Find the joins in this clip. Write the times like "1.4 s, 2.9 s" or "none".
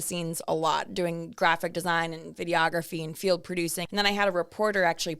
3.8 s